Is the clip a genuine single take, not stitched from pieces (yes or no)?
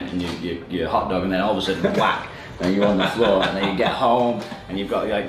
yes